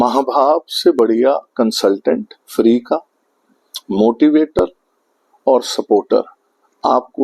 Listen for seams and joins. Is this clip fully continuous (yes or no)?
yes